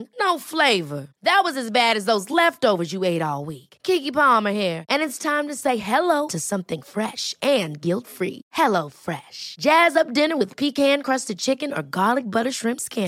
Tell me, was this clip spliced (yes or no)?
no